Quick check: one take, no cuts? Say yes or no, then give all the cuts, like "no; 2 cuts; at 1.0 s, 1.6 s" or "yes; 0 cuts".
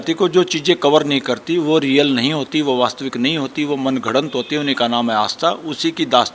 yes; 0 cuts